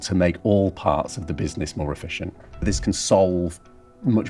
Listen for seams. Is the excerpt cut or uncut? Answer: cut